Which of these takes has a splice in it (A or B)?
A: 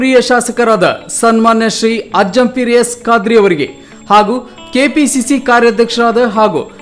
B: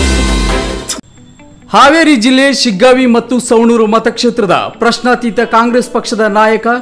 B